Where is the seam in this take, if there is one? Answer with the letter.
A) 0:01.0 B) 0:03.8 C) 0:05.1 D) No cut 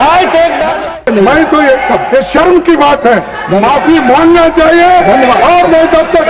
A